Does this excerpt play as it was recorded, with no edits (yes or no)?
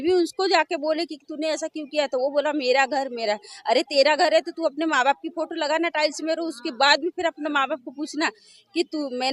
yes